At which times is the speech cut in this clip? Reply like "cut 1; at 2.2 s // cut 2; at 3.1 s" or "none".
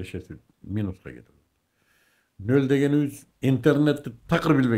none